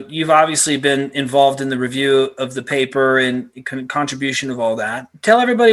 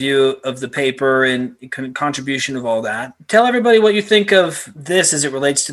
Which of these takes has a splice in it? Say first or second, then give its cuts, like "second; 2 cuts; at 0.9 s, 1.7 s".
second; 1 cut; at 4.7 s